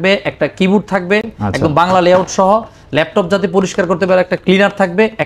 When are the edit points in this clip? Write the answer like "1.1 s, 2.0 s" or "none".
none